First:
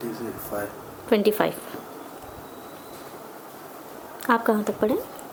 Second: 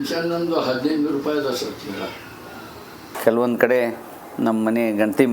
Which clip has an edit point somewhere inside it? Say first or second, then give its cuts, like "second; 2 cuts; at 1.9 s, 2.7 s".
second; 1 cut; at 3.2 s